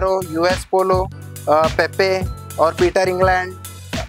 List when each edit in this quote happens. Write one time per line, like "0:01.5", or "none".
none